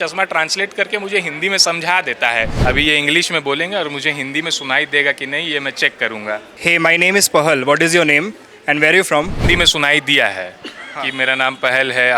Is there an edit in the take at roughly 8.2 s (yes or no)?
no